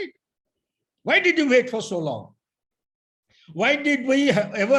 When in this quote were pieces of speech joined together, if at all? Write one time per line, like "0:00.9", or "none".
none